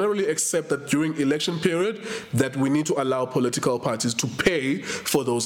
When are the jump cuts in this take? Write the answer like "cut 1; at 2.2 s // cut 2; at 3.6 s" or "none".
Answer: none